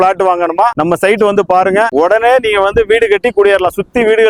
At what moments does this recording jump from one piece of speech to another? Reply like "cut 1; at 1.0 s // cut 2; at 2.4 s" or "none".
none